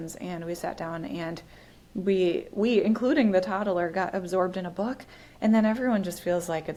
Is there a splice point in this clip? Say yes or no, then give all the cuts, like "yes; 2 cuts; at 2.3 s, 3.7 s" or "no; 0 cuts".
no; 0 cuts